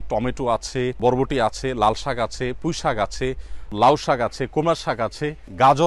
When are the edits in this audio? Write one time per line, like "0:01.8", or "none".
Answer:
0:01.0
0:03.7